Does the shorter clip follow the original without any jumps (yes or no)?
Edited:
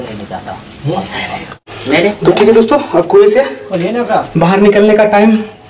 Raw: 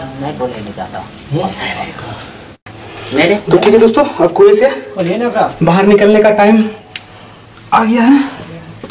no